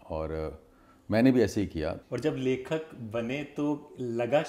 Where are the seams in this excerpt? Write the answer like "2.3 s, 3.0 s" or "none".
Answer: 2.0 s